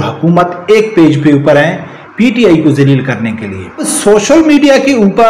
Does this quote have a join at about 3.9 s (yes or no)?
yes